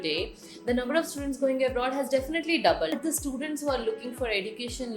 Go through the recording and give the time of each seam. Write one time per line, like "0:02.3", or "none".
0:02.9